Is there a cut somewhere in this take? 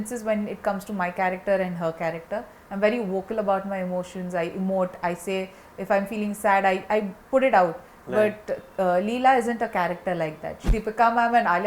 yes; 1 cut; at 10.7 s

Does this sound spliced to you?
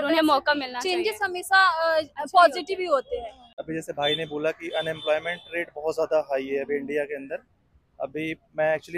yes; 1 cut; at 3.5 s

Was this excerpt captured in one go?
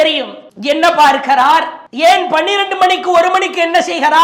yes; 0 cuts

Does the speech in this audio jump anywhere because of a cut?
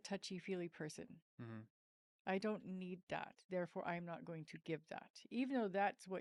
no; 0 cuts

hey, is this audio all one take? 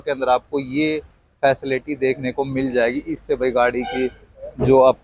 yes; 0 cuts

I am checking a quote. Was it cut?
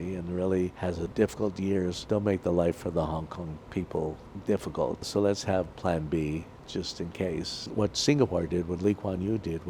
yes; 5 cuts; at 1.1 s, 2.0 s, 4.3 s, 5.1 s, 7.7 s

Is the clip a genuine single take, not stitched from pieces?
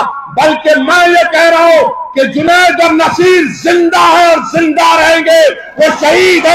yes; 0 cuts

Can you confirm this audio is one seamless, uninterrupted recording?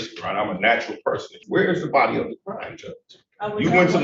no; 1 cut; at 1.4 s

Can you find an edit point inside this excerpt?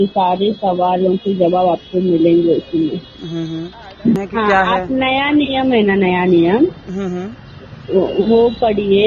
yes; 1 cut; at 4.2 s

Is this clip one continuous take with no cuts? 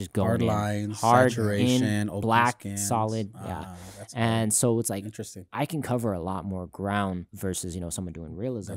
no; 1 cut; at 7.3 s

